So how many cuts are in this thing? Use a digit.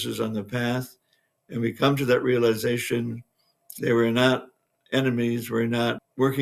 0